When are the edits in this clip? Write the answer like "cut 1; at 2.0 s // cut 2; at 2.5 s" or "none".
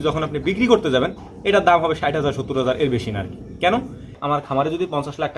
cut 1; at 4.2 s